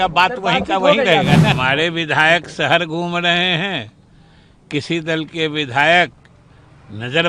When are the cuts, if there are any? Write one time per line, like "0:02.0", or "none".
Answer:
0:01.6